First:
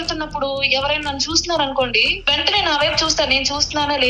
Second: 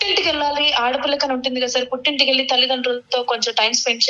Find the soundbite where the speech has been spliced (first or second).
first